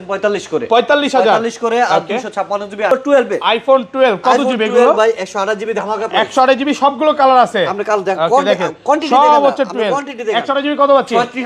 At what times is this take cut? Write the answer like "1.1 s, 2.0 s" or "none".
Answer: 2.9 s